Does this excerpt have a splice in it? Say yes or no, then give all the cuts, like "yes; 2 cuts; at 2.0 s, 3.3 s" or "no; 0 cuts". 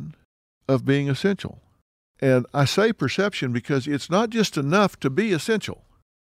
no; 0 cuts